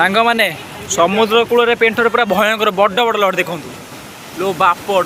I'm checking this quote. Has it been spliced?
no; 0 cuts

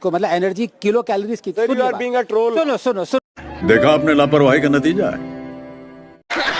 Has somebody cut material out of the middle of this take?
no; 0 cuts

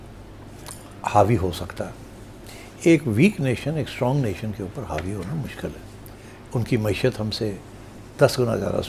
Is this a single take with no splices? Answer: yes; 0 cuts

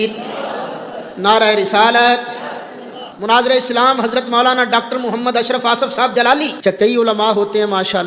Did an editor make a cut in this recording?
yes; 2 cuts; at 3.1 s, 6.5 s

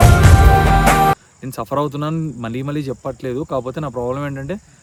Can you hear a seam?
no; 0 cuts

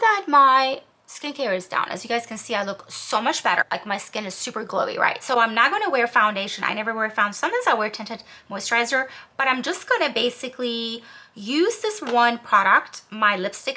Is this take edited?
no; 0 cuts

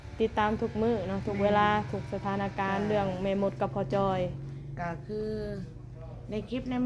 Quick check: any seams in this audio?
no; 0 cuts

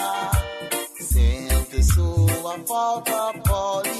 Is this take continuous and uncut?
yes; 0 cuts

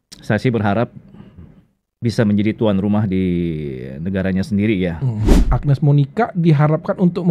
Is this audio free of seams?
no; 1 cut; at 5.5 s

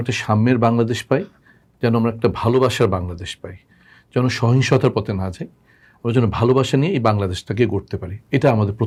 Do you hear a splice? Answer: no; 0 cuts

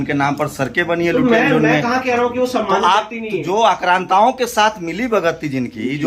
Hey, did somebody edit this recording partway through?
no; 0 cuts

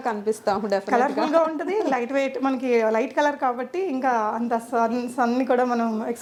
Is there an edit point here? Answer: no; 0 cuts

